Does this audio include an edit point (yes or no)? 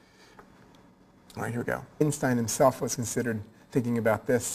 no